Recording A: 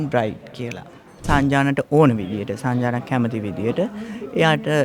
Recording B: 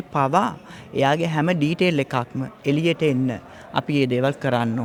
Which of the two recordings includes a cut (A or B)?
A